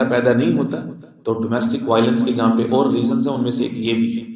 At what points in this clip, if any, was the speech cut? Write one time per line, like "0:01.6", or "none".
none